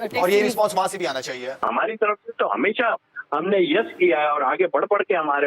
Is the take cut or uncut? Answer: cut